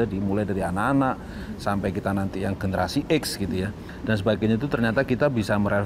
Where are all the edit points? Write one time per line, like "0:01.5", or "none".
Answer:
0:03.8

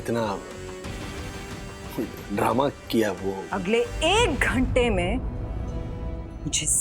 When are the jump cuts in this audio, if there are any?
0:03.5

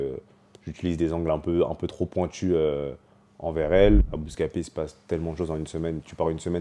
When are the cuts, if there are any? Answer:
0:04.1

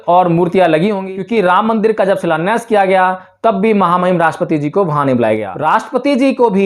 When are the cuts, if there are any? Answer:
0:01.0
0:05.5

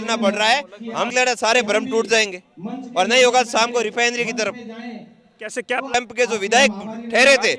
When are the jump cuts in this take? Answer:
0:01.1
0:05.9

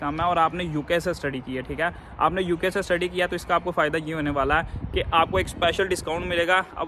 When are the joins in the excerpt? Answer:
none

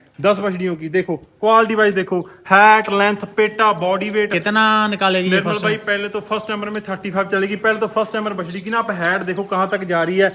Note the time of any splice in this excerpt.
none

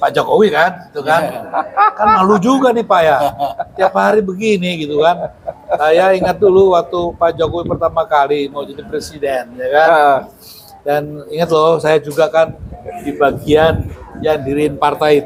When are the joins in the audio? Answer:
none

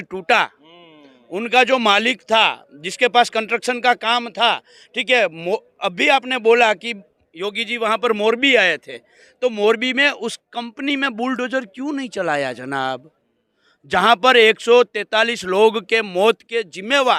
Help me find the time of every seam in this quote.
none

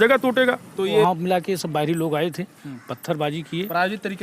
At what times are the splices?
0:01.0

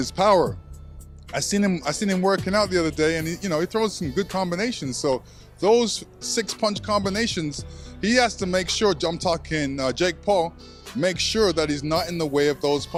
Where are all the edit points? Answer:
none

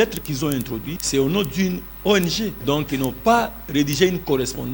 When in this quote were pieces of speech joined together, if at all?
0:00.9
0:02.6

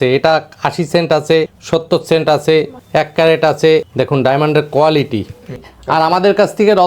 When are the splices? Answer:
0:01.6
0:02.8
0:03.9
0:05.7

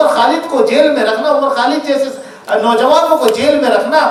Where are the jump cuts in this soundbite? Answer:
none

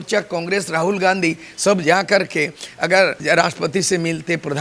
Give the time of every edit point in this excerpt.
0:03.2

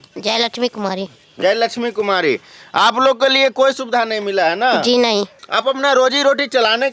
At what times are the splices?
0:05.4

